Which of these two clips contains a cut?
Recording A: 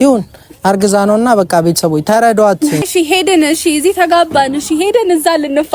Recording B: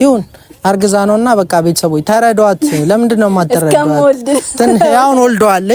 A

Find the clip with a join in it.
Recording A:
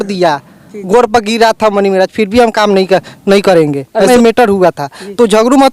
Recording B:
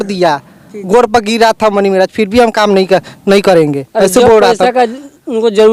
A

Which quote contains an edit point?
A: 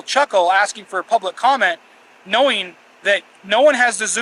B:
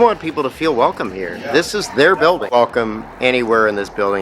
B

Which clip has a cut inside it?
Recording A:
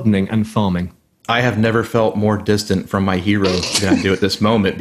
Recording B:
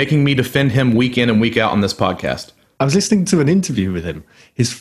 B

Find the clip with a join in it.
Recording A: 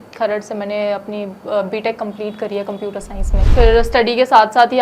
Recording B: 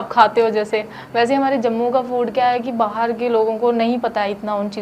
A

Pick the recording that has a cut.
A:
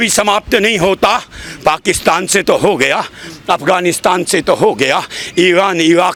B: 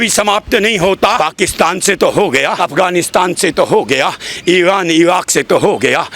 B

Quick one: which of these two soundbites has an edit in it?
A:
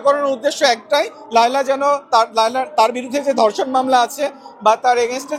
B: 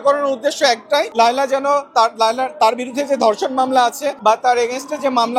B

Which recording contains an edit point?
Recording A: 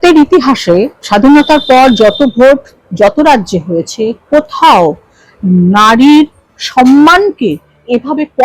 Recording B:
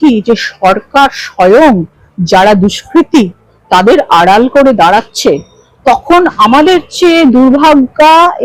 A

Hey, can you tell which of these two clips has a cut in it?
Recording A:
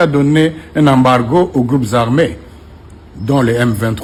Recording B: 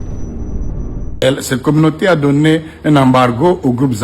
B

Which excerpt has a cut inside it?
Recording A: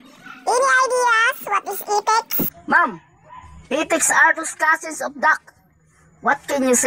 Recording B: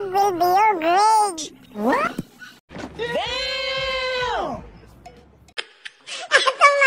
A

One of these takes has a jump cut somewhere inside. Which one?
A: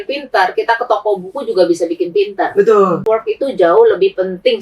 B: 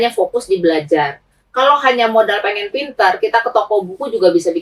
A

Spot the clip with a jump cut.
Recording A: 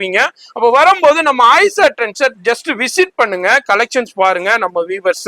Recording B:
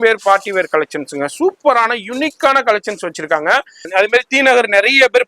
B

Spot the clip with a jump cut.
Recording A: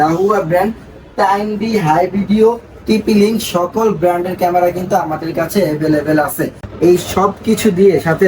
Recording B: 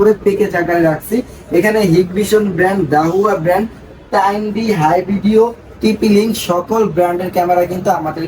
A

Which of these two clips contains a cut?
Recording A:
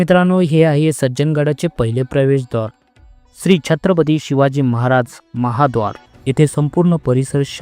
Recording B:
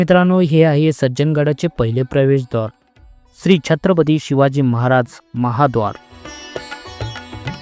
A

